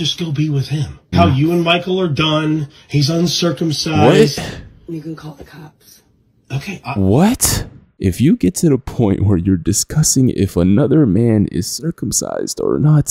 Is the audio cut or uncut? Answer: cut